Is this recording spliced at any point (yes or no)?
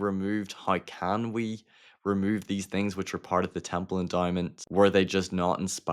yes